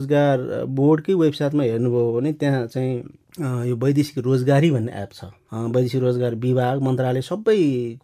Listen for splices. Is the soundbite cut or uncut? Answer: uncut